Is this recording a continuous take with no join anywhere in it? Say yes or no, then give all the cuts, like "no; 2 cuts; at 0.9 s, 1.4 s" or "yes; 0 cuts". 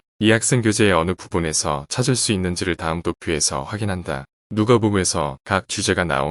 no; 1 cut; at 4.4 s